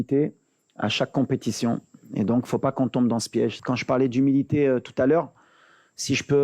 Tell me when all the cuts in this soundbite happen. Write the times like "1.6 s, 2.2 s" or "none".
3.6 s